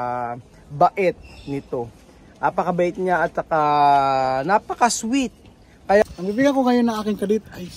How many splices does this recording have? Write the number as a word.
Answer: one